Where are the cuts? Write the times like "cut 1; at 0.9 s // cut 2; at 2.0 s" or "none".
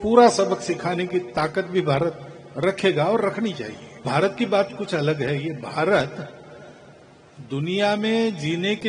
cut 1; at 4.0 s